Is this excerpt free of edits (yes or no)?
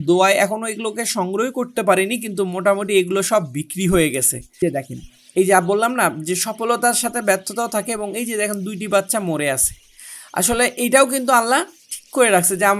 no